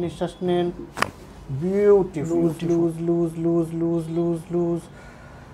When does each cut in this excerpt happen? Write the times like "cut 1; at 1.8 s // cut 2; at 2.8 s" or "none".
cut 1; at 2.2 s